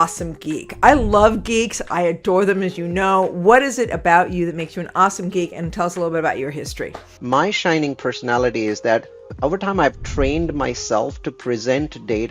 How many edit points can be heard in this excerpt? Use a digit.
2